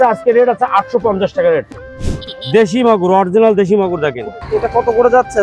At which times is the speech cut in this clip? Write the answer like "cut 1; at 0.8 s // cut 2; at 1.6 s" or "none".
cut 1; at 1.7 s // cut 2; at 4.3 s